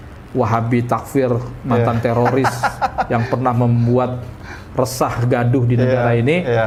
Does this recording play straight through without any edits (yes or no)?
yes